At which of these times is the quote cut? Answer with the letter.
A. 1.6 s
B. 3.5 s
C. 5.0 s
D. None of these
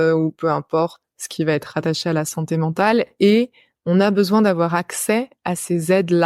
D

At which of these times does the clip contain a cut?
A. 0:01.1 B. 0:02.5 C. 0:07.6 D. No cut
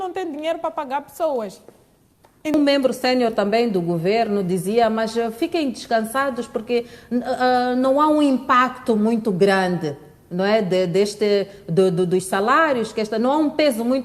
B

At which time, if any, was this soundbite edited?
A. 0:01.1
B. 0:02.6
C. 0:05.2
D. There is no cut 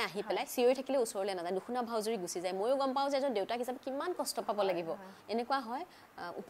C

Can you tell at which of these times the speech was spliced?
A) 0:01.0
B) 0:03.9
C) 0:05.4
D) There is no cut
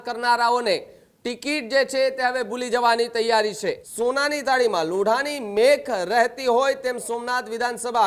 B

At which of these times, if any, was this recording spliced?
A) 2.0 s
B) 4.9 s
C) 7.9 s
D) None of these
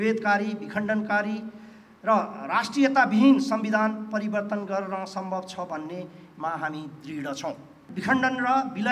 C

